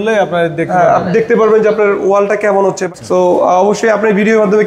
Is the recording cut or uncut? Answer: cut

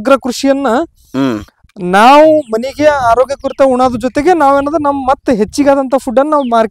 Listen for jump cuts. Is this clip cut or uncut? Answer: uncut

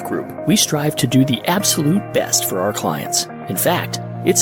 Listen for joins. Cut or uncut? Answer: uncut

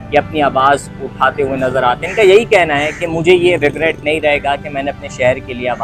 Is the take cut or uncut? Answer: uncut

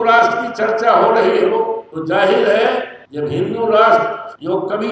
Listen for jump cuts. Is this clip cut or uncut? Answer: uncut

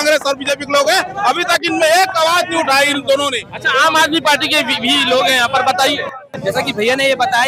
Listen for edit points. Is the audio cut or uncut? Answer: uncut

